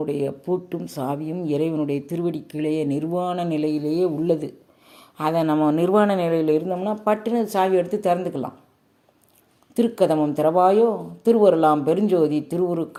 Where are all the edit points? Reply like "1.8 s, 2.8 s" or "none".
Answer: none